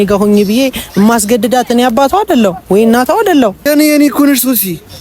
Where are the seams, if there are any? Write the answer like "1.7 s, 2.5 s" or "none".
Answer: 3.7 s